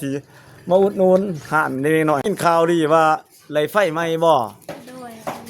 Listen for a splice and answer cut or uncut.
cut